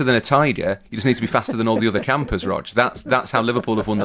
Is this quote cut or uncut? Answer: uncut